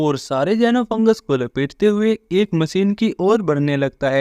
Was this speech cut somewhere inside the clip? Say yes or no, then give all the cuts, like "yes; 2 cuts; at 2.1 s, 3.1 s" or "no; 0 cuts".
no; 0 cuts